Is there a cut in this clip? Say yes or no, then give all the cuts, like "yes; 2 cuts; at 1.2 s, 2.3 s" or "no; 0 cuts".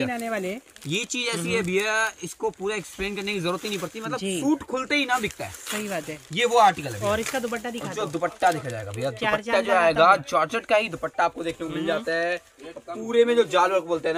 no; 0 cuts